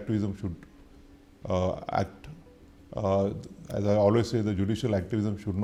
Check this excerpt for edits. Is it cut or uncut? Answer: uncut